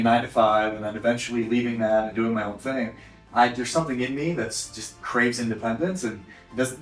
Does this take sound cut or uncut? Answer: uncut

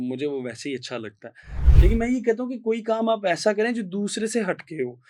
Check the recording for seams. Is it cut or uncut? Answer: cut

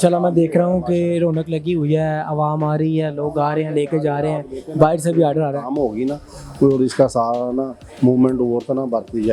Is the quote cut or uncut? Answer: uncut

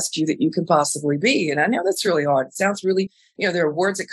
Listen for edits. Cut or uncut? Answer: uncut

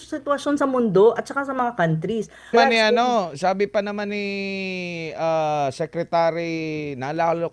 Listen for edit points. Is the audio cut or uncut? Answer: cut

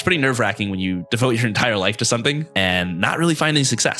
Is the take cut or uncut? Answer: cut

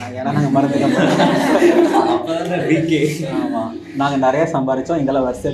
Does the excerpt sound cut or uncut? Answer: uncut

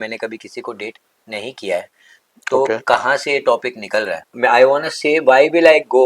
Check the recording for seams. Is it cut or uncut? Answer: cut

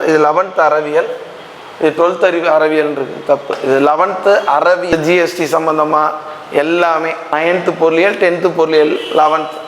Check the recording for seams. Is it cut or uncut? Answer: cut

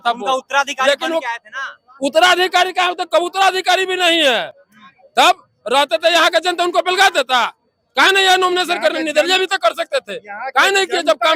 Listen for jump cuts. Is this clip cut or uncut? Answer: uncut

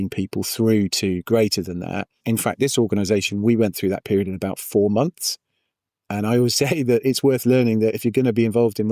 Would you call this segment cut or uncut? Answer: cut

